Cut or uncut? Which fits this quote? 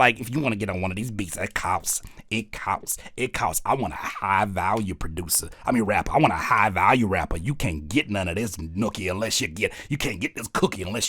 uncut